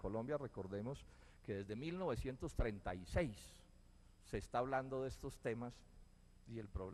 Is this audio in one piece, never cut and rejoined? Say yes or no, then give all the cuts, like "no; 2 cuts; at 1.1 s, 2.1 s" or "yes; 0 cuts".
yes; 0 cuts